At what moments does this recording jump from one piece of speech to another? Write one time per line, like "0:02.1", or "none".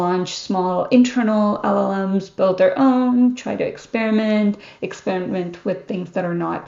none